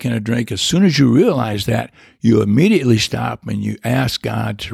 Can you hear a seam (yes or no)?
no